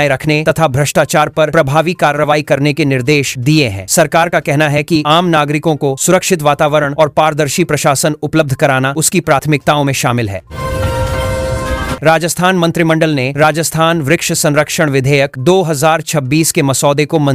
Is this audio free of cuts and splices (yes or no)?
yes